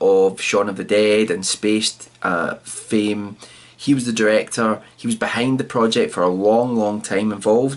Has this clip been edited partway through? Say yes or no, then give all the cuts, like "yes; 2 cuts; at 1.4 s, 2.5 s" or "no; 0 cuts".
yes; 1 cut; at 1.8 s